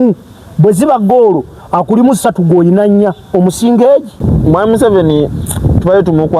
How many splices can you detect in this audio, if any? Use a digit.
1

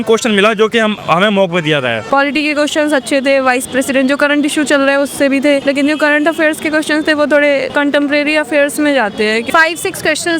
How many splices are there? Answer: 4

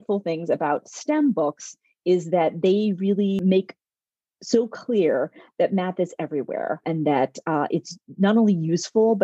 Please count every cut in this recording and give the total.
2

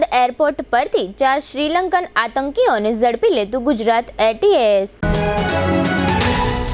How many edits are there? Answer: 0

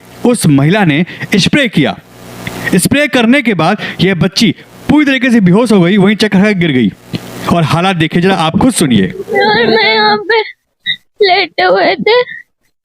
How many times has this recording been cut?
0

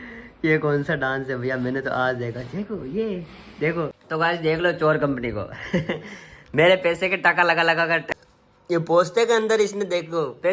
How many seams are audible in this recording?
2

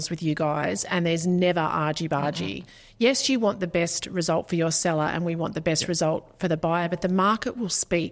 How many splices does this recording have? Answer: 0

